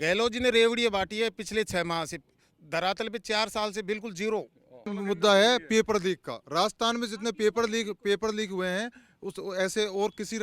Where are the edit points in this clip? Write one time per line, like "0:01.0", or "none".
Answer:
0:04.9